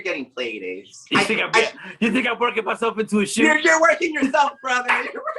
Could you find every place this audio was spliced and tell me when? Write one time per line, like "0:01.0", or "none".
0:00.9